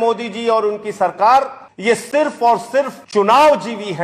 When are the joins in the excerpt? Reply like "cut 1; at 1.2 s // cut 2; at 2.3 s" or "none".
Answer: cut 1; at 1.6 s // cut 2; at 3.0 s